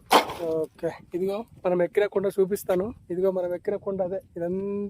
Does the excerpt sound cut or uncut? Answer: uncut